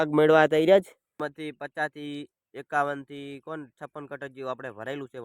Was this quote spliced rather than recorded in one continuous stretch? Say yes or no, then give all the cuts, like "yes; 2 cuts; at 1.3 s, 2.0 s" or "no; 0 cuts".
yes; 1 cut; at 1.2 s